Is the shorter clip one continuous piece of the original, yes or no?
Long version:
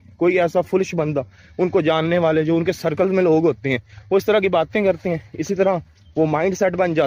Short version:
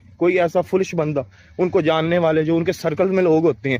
yes